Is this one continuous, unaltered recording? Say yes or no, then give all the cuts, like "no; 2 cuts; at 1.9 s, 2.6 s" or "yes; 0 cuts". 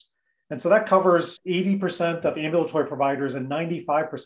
no; 1 cut; at 1.3 s